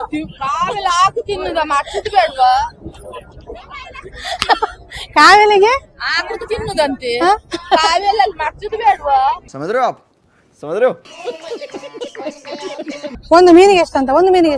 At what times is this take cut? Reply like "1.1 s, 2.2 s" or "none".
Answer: 13.1 s